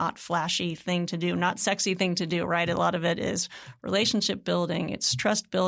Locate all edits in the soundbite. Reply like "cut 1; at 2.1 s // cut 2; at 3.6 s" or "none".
none